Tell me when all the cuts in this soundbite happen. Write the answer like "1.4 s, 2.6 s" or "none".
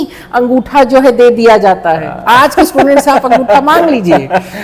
none